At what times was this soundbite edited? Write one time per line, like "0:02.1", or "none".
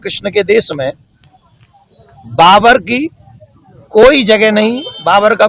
none